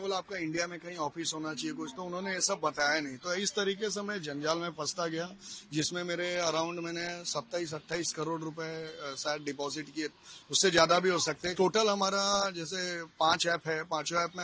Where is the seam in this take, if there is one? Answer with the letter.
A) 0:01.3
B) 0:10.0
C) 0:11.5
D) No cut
C